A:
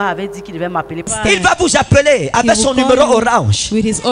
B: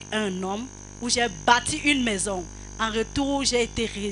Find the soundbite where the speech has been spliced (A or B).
A